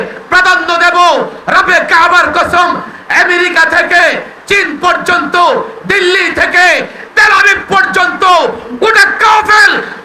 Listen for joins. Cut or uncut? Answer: uncut